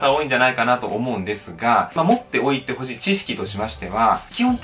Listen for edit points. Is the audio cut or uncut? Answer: cut